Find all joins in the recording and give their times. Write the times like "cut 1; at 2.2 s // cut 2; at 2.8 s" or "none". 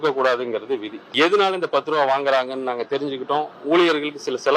cut 1; at 1.0 s

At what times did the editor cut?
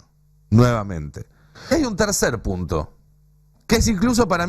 cut 1; at 1.7 s

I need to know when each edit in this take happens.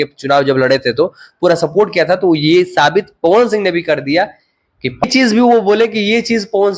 cut 1; at 5.0 s

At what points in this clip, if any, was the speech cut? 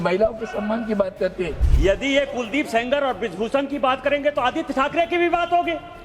cut 1; at 1.6 s

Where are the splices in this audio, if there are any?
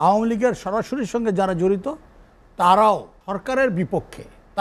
cut 1; at 3.1 s

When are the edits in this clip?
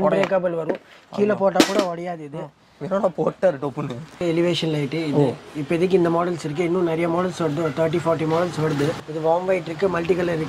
cut 1; at 4.2 s // cut 2; at 9.0 s

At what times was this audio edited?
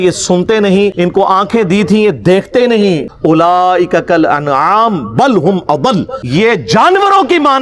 cut 1; at 0.9 s // cut 2; at 3.1 s // cut 3; at 6.2 s

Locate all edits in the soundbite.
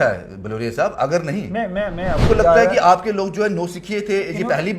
cut 1; at 2.2 s

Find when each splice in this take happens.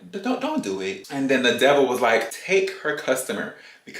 cut 1; at 1.0 s // cut 2; at 2.3 s

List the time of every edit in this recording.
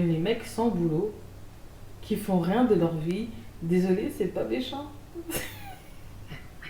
none

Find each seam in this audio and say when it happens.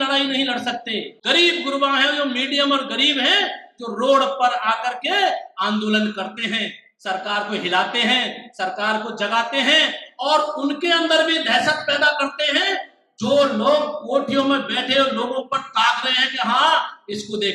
cut 1; at 1.2 s

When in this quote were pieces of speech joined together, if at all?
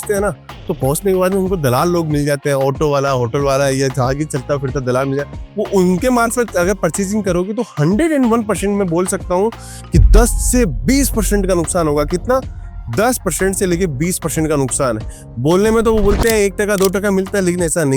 none

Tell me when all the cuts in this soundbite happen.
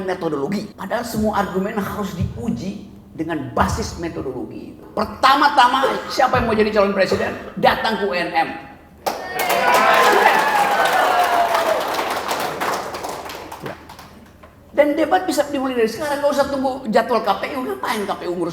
cut 1; at 4.8 s

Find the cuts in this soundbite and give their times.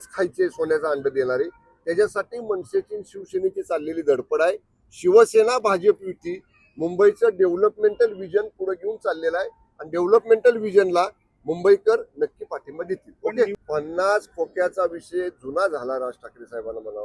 none

